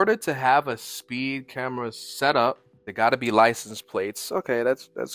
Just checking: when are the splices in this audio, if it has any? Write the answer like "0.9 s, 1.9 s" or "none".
none